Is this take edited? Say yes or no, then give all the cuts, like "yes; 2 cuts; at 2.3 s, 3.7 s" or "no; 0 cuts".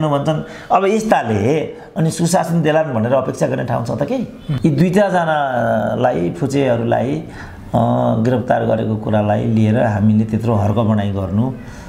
yes; 1 cut; at 4.4 s